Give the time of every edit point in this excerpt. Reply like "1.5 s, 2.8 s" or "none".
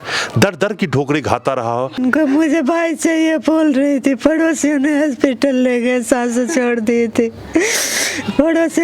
2.0 s